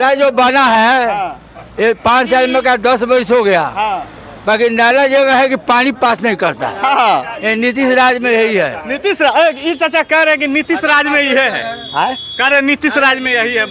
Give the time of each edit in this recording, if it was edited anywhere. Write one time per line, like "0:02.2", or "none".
none